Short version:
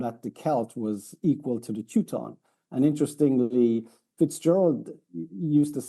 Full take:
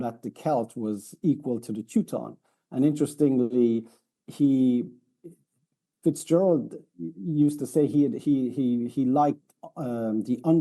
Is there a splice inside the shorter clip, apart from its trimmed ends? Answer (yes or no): yes